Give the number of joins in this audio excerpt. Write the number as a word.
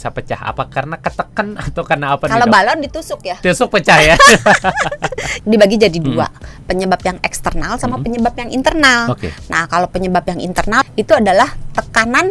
two